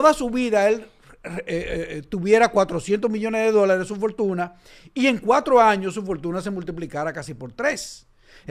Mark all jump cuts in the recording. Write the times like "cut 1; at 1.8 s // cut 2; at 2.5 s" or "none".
none